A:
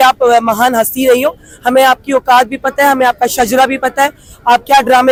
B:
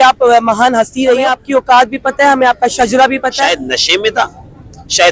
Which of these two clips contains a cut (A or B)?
B